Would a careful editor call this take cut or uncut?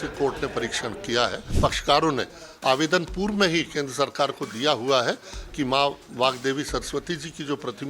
cut